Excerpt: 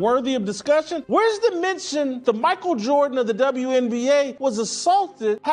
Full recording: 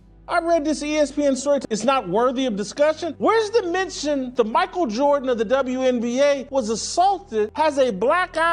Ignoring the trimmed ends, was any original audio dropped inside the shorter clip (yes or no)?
no